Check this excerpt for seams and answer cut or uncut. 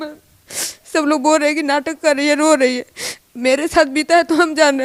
uncut